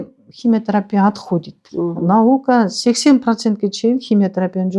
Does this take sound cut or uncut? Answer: cut